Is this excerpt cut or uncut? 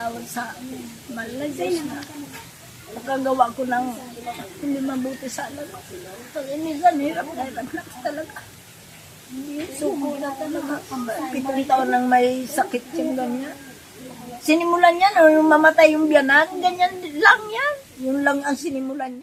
uncut